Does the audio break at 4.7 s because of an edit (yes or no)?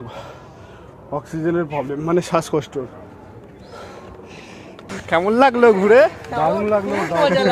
yes